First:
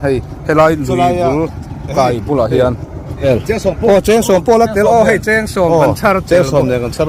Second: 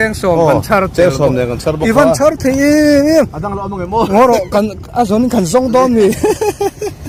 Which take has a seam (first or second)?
first